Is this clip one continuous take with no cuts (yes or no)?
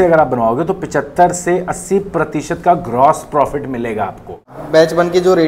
no